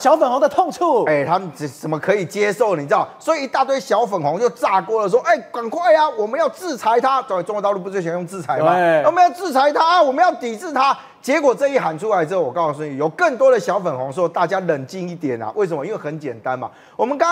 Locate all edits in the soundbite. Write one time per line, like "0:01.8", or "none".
none

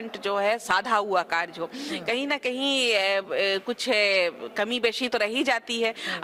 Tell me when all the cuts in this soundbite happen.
none

